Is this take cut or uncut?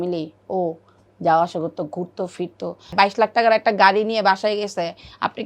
cut